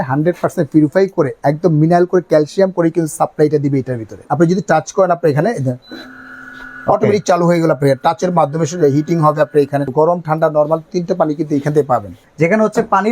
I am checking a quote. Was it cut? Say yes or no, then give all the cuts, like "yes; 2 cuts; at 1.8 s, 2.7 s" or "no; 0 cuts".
yes; 3 cuts; at 4.2 s, 9.9 s, 12.2 s